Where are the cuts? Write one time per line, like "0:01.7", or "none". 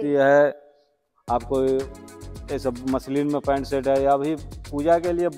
none